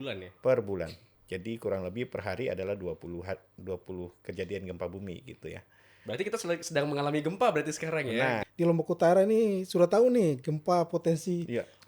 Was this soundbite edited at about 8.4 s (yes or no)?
yes